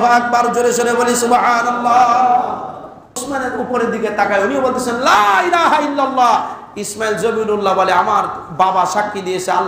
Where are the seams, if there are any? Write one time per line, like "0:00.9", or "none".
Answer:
0:03.2